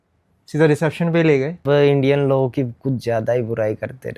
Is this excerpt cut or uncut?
cut